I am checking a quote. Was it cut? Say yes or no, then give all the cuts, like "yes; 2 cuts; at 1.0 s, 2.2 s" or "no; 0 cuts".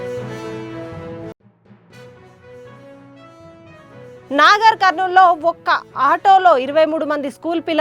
no; 0 cuts